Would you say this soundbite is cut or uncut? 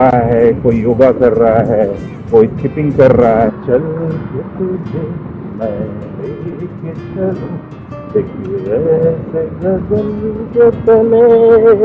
cut